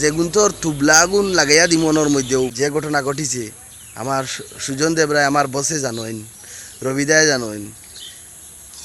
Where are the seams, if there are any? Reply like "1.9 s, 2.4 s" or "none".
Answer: 2.5 s